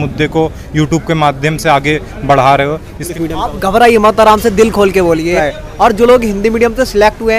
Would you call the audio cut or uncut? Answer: cut